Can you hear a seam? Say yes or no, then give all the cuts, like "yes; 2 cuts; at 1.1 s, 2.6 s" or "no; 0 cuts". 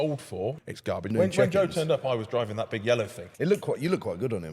yes; 2 cuts; at 1.0 s, 3.2 s